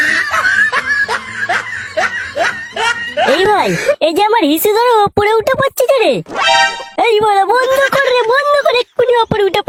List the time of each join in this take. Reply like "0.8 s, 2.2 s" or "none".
none